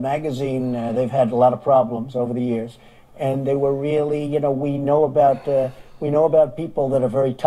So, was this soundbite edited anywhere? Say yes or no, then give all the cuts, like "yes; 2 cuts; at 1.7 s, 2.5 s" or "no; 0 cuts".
yes; 1 cut; at 5.3 s